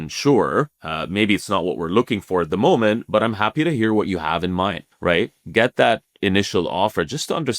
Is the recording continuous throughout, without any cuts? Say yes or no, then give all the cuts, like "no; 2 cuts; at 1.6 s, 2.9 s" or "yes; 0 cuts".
no; 1 cut; at 4.9 s